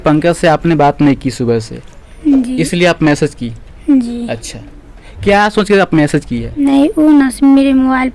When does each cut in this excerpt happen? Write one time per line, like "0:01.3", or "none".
0:06.6